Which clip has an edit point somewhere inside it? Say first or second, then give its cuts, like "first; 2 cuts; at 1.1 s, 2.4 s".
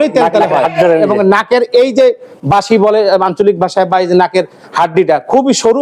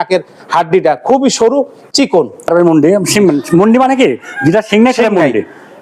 second; 1 cut; at 2.5 s